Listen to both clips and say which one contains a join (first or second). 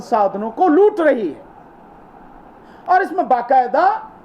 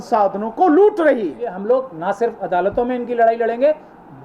second